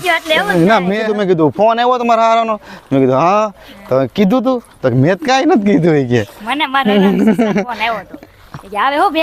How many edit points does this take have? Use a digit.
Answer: 1